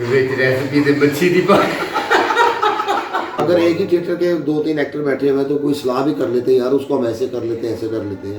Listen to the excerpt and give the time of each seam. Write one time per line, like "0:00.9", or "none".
0:03.4